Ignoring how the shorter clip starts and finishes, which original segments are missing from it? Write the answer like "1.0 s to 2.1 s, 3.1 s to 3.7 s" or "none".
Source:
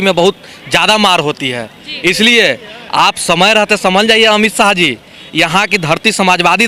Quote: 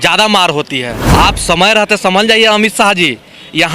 1.7 s to 2.8 s